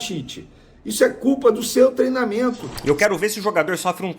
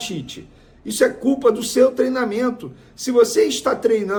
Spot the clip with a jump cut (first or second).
first